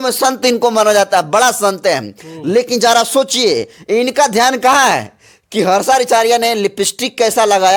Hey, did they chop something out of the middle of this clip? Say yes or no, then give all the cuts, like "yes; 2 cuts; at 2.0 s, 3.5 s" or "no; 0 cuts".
no; 0 cuts